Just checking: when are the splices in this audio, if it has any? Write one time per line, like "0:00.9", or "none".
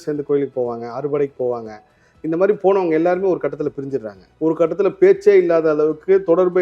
0:04.2